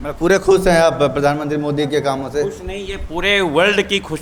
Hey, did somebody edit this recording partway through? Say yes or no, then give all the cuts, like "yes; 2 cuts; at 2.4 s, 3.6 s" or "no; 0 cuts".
no; 0 cuts